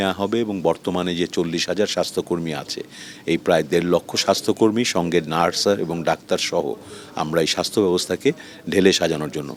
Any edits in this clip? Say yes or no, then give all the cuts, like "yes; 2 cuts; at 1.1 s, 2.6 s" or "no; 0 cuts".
no; 0 cuts